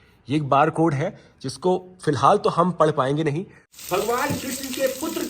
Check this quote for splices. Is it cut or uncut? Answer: cut